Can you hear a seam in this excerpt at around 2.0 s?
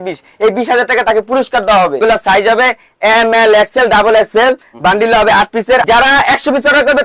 yes; 2 cuts; at 2.0 s, 5.8 s

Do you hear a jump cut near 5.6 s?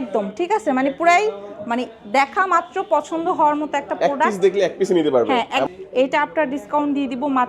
yes; 1 cut; at 5.6 s

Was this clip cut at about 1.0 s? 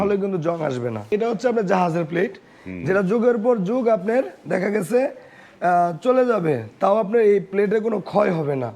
yes; 1 cut; at 1.0 s

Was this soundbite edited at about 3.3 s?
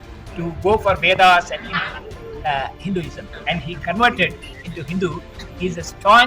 yes; 1 cut; at 3.3 s

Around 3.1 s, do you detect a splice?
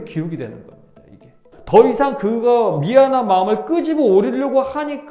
no; 1 cut; at 1.5 s

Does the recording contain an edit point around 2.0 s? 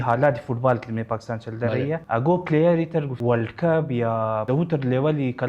yes; 3 cuts; at 2.0 s, 3.1 s, 4.4 s

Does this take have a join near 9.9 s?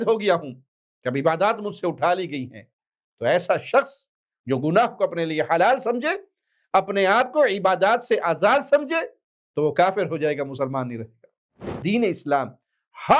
no; 1 cut; at 11.8 s

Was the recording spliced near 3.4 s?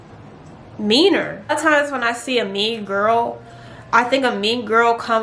no; 1 cut; at 1.4 s

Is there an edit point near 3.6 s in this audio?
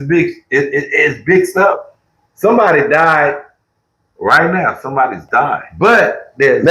no; 1 cut; at 5.6 s

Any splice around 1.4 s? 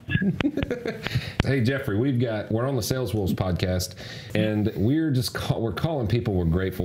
yes; 2 cuts; at 1.4 s, 4.1 s

